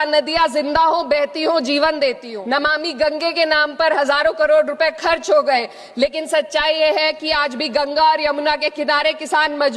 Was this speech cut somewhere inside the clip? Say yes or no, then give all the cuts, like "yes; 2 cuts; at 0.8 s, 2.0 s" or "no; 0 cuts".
yes; 1 cut; at 2.3 s